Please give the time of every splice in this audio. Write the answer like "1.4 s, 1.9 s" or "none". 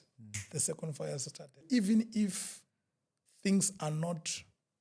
1.6 s